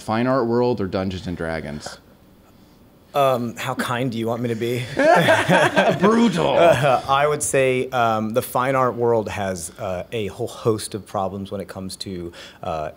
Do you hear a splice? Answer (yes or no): no